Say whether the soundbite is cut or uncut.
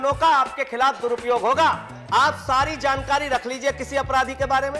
cut